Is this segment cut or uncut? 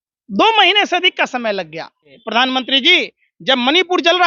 cut